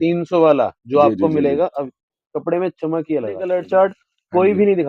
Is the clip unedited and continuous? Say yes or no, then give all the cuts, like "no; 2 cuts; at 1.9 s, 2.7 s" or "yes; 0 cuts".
no; 1 cut; at 3.4 s